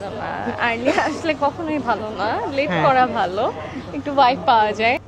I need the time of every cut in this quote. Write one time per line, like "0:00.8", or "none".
none